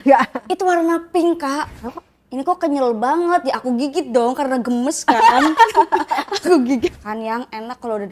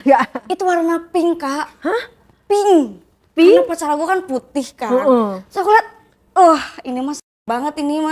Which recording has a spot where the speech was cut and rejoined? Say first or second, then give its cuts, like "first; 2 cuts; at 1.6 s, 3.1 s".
first; 2 cuts; at 1.7 s, 7.1 s